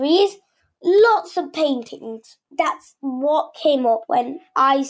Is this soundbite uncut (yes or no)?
no